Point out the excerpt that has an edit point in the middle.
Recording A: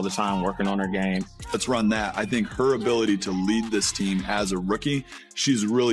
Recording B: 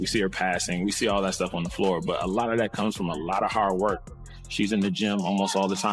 A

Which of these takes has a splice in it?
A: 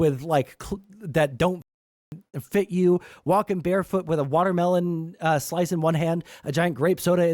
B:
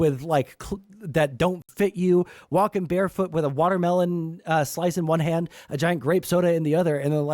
B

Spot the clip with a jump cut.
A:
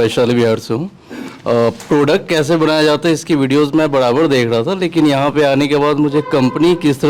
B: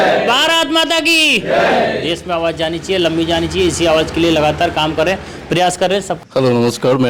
B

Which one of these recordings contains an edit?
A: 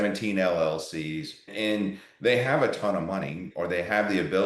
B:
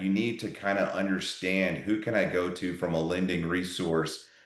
A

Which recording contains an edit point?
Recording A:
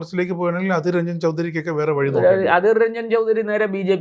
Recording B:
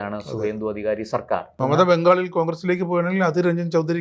B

